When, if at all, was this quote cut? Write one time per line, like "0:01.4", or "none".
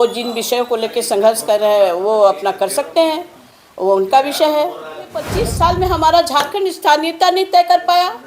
0:05.4